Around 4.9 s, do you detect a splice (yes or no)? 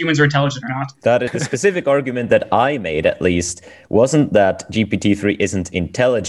no